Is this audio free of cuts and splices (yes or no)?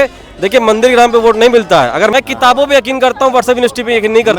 no